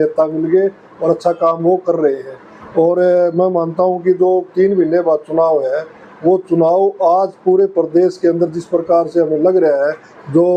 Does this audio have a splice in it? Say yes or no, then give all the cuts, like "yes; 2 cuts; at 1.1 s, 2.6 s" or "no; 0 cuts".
no; 0 cuts